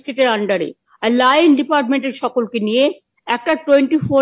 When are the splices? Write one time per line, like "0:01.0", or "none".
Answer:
0:03.1